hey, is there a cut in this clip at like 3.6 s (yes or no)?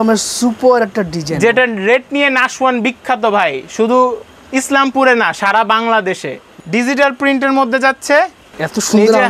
no